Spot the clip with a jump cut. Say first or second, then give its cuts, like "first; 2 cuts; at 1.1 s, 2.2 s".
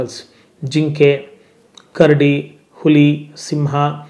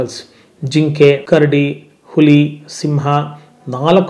second; 1 cut; at 1.2 s